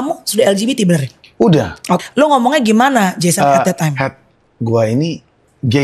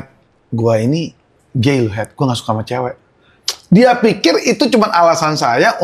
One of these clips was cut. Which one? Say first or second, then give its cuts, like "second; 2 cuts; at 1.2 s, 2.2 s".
first; 1 cut; at 2.1 s